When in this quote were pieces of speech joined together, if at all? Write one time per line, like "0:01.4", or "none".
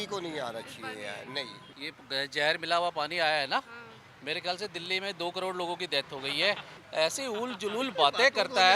none